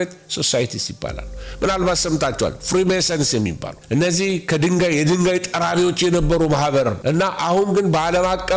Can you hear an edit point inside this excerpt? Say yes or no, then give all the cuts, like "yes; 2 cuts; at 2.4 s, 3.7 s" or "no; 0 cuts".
no; 0 cuts